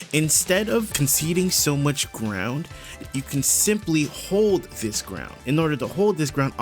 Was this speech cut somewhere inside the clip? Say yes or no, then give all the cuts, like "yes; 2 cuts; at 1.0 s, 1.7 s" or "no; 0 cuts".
yes; 3 cuts; at 0.9 s, 3.0 s, 5.3 s